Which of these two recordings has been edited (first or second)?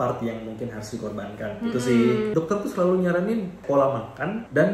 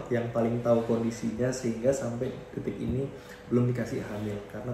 first